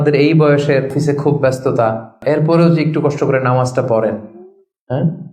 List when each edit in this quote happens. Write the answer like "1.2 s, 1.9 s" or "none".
0.9 s, 2.2 s